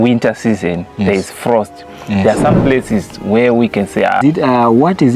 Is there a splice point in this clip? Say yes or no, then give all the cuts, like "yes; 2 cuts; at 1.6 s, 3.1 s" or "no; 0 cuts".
yes; 1 cut; at 4.2 s